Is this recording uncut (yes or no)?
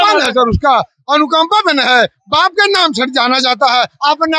yes